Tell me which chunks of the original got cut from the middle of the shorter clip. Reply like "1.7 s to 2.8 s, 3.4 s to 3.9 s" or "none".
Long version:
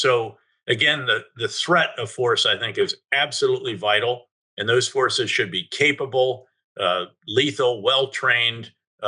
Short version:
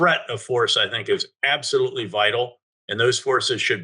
none